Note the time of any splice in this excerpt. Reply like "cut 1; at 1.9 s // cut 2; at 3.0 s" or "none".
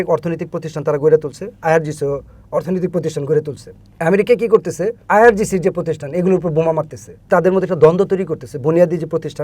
cut 1; at 4.9 s // cut 2; at 7.3 s